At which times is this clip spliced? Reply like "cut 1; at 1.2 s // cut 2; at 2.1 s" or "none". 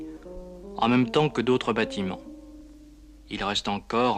cut 1; at 1.9 s